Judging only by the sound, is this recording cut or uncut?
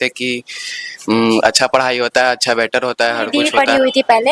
cut